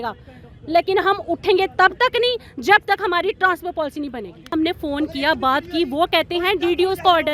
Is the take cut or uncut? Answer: cut